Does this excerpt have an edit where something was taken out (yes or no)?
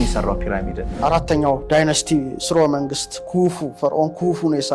yes